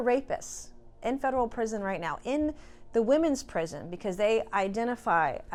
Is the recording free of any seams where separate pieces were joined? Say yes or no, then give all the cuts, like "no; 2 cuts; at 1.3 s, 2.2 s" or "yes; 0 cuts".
yes; 0 cuts